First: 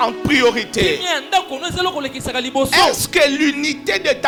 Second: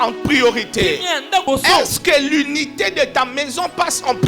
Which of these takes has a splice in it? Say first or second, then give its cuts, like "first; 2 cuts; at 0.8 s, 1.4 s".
second; 1 cut; at 1.4 s